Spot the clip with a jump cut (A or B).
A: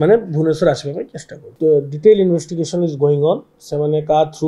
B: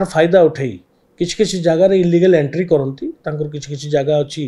A